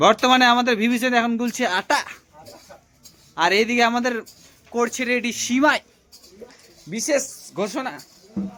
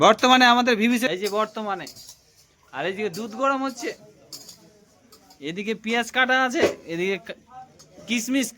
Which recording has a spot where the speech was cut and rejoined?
second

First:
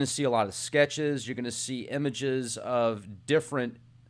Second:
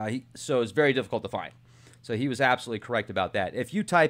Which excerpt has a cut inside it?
second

